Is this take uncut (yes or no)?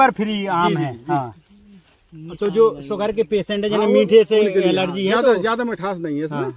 yes